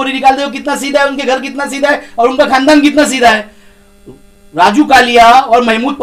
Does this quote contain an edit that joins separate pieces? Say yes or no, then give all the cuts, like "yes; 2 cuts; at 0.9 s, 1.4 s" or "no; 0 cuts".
no; 0 cuts